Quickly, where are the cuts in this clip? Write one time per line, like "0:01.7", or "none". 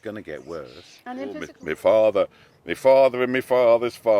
0:01.5